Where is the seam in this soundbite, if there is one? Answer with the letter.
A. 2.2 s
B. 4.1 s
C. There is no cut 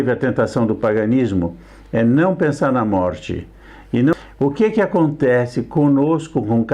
B